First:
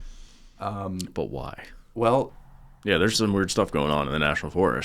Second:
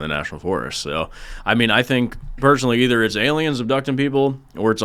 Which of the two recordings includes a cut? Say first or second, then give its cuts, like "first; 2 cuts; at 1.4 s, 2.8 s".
first; 1 cut; at 2.3 s